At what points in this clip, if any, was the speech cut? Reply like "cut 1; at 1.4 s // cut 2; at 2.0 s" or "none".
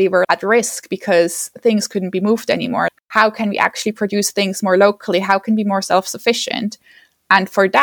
cut 1; at 3.0 s